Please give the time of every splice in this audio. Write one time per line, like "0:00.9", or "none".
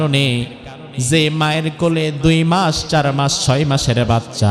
none